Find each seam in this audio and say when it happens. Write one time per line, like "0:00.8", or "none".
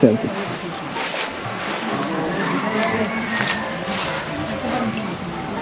none